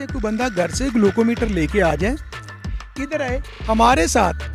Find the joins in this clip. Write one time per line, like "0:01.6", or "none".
none